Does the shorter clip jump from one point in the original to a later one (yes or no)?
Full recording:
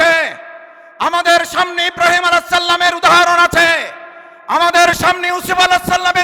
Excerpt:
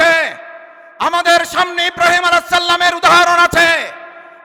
no